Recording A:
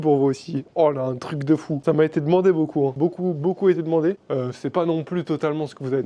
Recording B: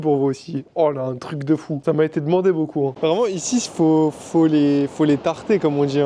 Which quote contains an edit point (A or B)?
B